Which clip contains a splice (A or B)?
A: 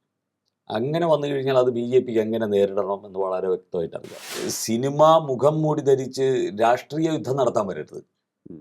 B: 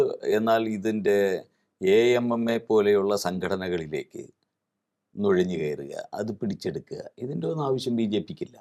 A